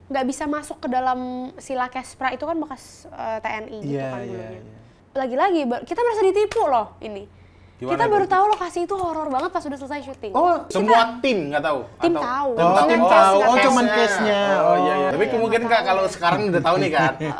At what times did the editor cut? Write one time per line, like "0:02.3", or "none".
0:05.0
0:10.7
0:15.1